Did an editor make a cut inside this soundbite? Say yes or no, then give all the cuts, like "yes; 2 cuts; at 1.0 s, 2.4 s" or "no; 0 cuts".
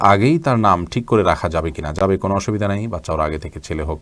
no; 0 cuts